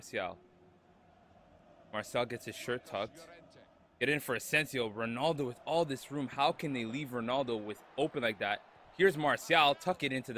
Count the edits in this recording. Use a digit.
0